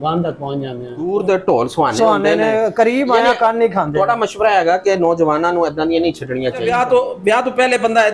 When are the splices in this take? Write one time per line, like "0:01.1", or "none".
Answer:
0:01.1
0:02.6
0:06.6

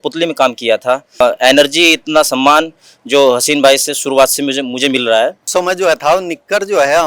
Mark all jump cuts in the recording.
0:01.2
0:05.4

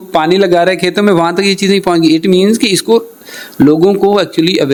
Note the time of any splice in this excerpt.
none

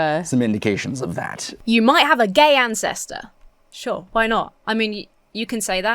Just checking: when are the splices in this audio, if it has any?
0:01.4

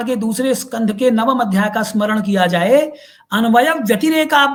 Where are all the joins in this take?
none

